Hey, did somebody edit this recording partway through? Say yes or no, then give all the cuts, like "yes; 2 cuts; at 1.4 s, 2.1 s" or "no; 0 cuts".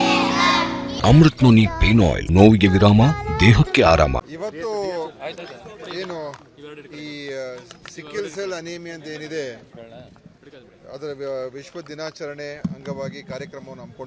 yes; 3 cuts; at 0.9 s, 2.2 s, 4.3 s